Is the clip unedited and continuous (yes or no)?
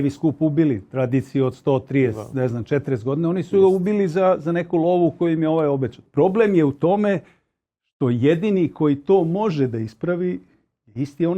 no